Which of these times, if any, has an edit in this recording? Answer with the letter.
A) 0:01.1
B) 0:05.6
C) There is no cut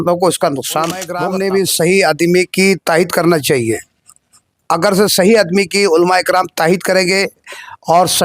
A